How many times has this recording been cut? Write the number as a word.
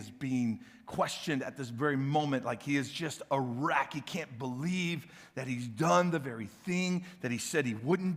zero